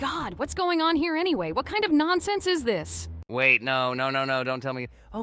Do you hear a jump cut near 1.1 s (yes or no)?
no